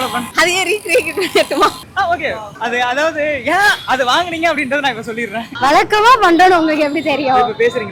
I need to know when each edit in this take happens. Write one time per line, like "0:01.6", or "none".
0:05.5